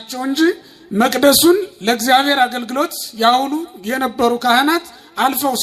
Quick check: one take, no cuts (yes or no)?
yes